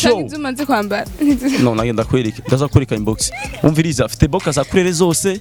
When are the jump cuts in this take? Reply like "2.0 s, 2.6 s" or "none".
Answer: none